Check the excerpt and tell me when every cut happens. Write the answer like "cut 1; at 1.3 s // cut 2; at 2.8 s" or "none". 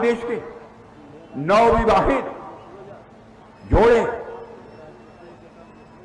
none